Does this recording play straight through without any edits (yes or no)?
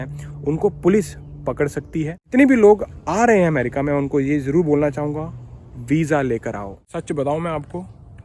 no